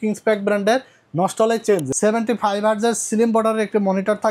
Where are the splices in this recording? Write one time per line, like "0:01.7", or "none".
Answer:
0:01.9